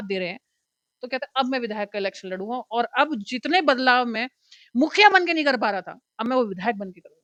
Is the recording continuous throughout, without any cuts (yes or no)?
yes